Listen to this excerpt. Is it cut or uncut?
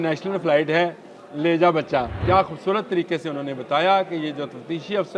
cut